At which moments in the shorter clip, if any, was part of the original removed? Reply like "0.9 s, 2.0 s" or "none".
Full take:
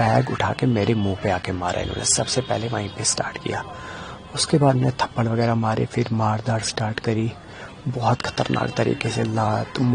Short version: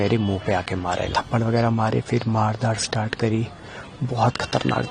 1.1 s